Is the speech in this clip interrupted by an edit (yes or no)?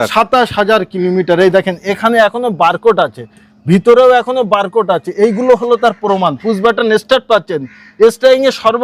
no